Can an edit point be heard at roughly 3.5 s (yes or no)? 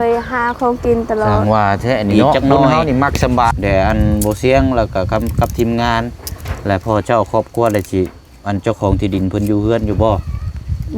yes